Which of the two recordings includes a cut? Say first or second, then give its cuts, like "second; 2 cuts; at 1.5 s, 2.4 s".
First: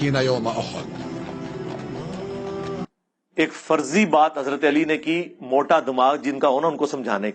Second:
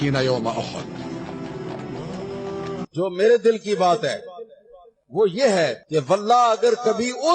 second; 1 cut; at 2.8 s